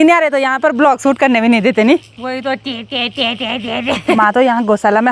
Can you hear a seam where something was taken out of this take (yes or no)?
yes